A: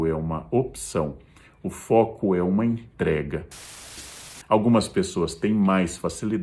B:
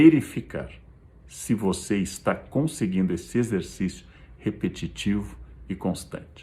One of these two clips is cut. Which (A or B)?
A